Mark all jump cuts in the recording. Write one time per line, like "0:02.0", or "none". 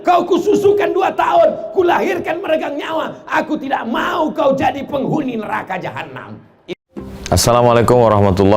0:06.6